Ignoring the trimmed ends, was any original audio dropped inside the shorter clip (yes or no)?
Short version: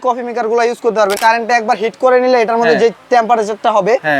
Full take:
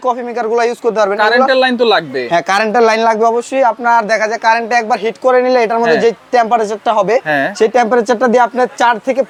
yes